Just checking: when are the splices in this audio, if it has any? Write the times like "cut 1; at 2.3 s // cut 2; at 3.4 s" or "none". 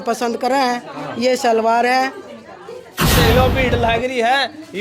cut 1; at 3.1 s